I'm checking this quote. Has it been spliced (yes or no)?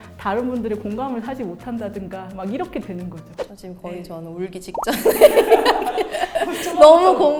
no